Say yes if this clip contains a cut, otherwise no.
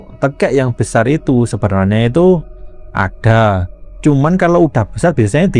no